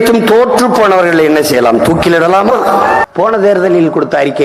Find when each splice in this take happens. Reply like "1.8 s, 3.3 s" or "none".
3.0 s